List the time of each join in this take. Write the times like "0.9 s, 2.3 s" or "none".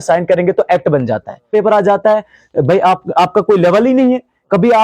1.5 s